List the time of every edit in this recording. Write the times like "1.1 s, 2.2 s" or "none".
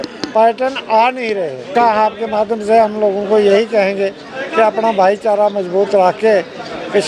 1.7 s